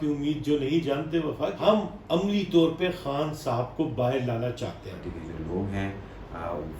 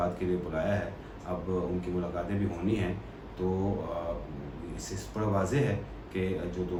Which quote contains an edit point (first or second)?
first